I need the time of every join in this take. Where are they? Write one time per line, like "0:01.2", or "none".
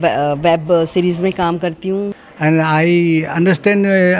0:02.2